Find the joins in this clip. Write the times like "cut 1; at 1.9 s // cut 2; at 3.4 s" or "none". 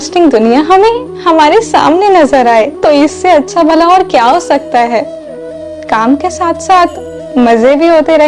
cut 1; at 2.7 s